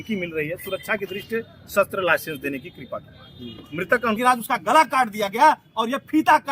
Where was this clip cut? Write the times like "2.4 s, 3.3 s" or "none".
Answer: 4.2 s